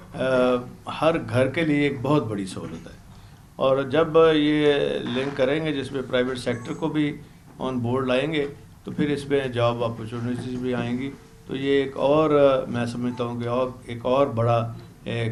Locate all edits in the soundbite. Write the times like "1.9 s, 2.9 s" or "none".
none